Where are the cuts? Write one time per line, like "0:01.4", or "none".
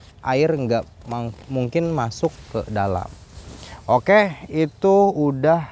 none